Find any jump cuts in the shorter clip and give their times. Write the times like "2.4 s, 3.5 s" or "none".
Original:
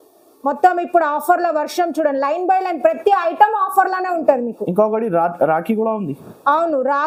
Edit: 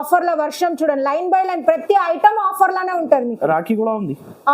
3.4 s